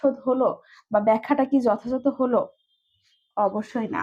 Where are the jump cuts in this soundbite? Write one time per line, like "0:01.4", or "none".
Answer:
none